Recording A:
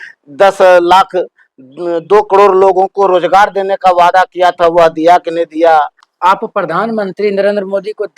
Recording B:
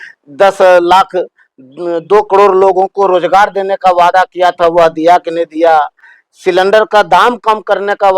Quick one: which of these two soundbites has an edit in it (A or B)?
A